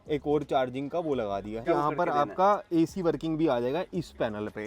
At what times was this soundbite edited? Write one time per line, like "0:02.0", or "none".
0:01.7